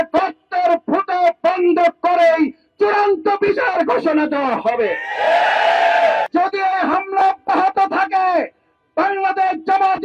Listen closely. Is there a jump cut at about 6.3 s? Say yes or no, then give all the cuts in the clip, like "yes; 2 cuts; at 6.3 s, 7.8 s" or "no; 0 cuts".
yes; 1 cut; at 6.3 s